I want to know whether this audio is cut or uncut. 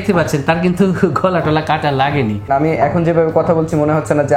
cut